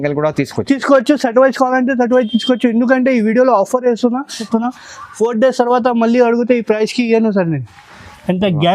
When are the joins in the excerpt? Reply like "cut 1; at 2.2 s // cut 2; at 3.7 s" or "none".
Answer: cut 1; at 4.4 s